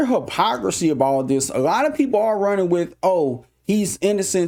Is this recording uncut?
yes; 0 cuts

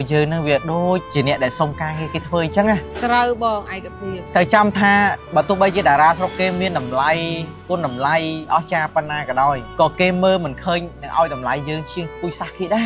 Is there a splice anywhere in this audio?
no; 0 cuts

